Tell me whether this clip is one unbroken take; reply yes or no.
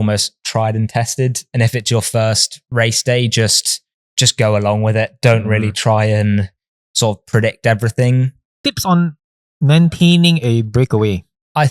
no